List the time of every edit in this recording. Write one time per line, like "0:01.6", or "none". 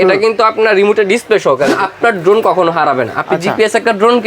0:01.7